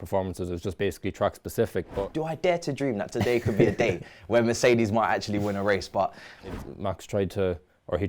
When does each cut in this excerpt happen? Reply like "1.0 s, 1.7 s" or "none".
2.0 s, 6.6 s